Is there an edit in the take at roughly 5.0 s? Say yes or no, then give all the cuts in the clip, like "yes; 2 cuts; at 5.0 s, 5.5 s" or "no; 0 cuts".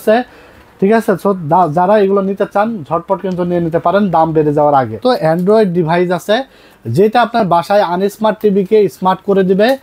yes; 1 cut; at 5.0 s